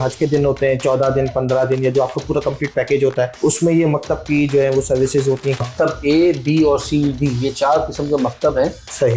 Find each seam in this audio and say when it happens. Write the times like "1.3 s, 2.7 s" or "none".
3.3 s, 5.6 s